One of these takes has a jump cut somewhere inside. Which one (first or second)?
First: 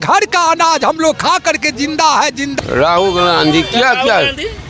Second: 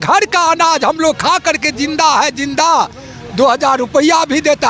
first